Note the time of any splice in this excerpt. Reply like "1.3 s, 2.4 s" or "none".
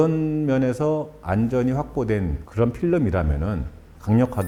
none